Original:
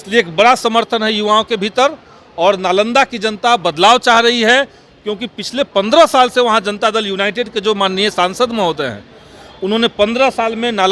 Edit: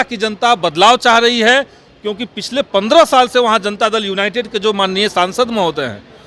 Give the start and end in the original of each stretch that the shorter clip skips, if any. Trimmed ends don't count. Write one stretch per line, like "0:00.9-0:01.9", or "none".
none